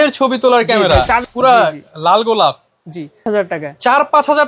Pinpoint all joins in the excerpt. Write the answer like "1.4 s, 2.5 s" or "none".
1.2 s, 3.2 s